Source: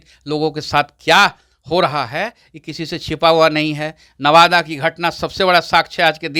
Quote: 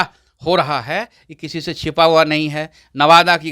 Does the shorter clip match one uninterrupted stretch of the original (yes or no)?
yes